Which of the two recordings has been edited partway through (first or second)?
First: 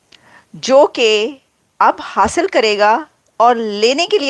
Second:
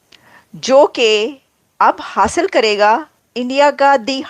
second